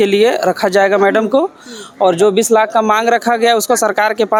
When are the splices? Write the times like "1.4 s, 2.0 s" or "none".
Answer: none

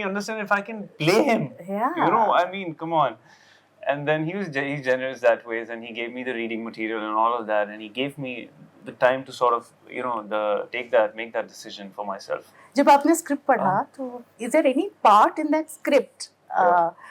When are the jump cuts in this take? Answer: none

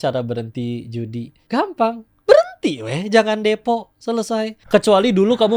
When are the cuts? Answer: 1.3 s, 4.5 s

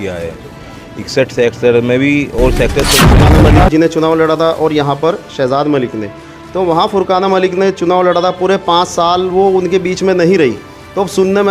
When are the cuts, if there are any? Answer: 3.2 s

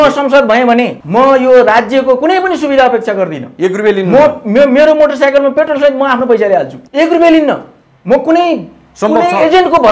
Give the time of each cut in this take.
1.0 s, 6.8 s

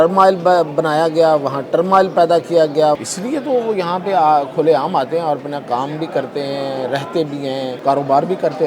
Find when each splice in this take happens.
3.0 s, 7.8 s

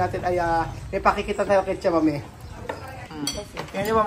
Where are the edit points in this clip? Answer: 3.1 s

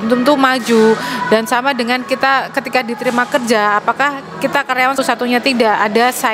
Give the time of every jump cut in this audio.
4.9 s

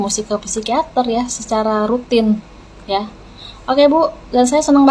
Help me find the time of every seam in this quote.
none

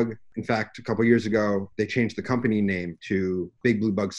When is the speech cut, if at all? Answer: 1.7 s, 2.9 s

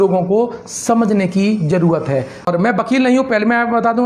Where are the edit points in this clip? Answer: 2.5 s

